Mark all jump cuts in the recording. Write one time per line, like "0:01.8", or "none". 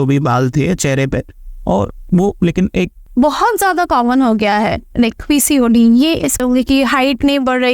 0:03.0
0:06.4